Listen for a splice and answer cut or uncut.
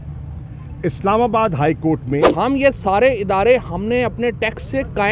cut